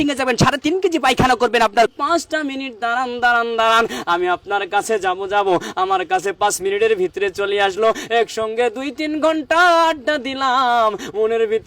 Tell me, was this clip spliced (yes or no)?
yes